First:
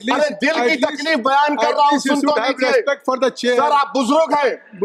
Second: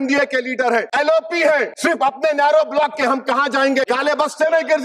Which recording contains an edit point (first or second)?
second